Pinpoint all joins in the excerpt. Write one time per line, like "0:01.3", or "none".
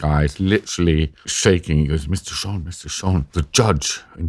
0:01.3
0:03.3